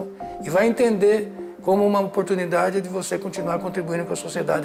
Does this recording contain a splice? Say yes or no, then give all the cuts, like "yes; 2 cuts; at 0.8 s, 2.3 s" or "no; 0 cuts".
no; 0 cuts